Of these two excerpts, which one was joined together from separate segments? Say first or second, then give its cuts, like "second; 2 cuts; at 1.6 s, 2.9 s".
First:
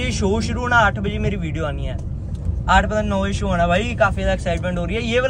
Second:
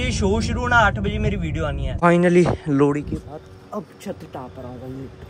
second; 1 cut; at 1.9 s